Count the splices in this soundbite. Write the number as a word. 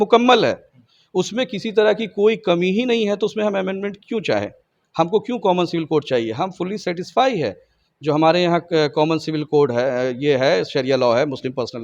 zero